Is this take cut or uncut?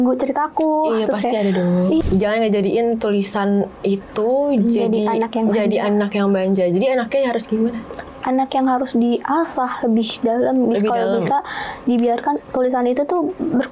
cut